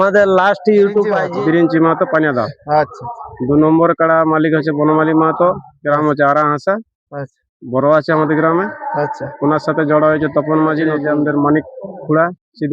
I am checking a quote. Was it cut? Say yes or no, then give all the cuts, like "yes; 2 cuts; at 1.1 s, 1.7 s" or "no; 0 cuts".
yes; 2 cuts; at 1.2 s, 11.0 s